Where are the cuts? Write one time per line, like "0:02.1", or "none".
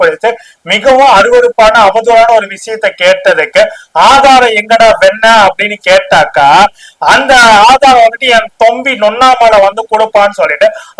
none